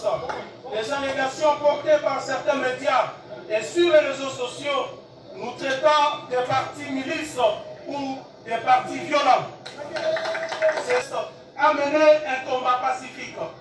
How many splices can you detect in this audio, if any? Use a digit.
1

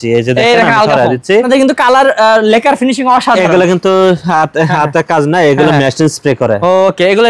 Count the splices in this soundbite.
1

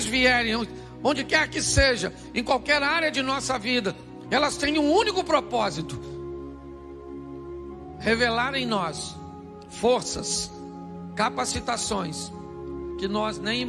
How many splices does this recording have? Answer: 0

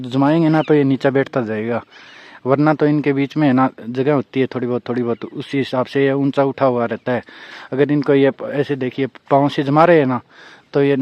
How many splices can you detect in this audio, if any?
0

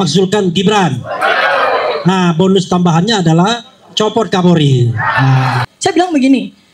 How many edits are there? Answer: 1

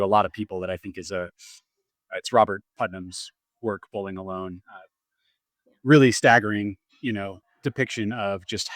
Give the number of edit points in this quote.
1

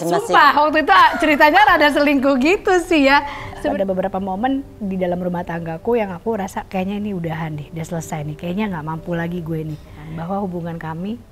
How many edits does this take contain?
2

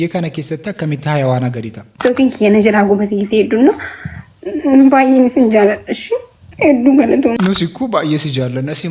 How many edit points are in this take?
2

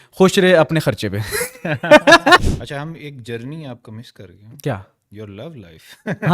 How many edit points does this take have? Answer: 1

